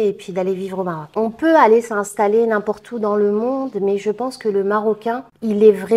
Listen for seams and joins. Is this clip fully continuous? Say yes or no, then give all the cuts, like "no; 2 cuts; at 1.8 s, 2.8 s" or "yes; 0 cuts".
no; 1 cut; at 1.0 s